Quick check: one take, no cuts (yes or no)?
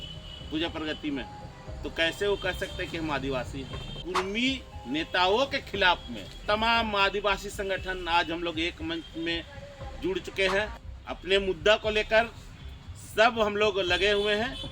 no